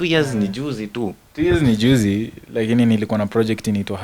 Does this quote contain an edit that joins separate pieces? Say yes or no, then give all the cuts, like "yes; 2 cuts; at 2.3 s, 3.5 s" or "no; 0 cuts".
no; 0 cuts